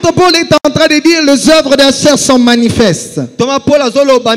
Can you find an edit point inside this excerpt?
no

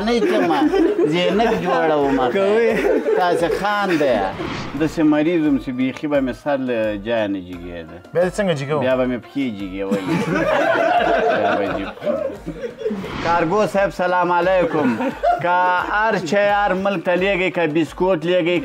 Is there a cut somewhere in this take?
yes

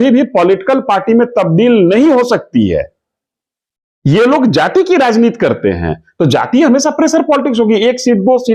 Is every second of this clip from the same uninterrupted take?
yes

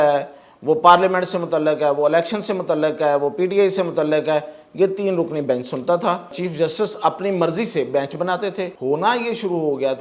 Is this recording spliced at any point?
yes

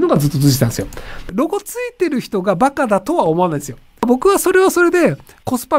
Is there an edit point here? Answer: yes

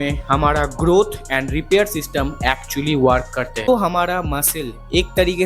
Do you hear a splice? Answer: yes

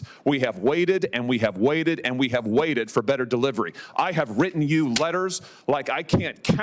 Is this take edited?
no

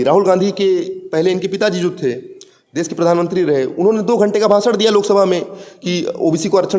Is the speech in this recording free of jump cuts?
yes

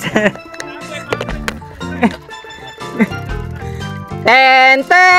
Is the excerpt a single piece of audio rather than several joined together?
yes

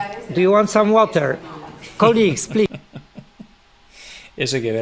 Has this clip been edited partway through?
no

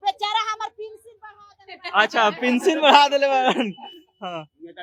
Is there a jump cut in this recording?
no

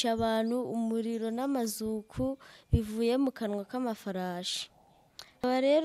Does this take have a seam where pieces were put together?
no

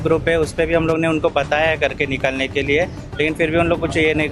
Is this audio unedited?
yes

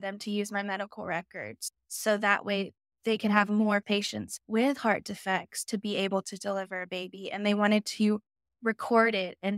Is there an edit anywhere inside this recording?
yes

